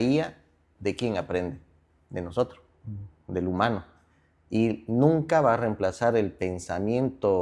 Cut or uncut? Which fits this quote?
uncut